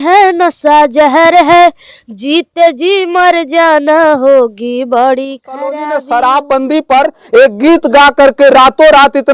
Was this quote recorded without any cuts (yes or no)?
no